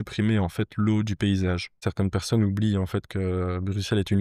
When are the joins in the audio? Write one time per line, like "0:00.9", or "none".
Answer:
0:01.8